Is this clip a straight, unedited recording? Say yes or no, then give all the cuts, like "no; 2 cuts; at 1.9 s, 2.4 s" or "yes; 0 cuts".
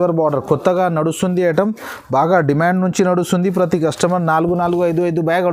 yes; 0 cuts